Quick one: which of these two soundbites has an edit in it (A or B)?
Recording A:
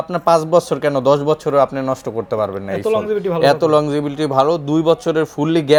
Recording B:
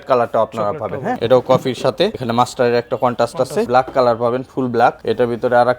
B